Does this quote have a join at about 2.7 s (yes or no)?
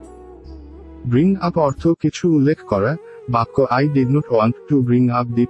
no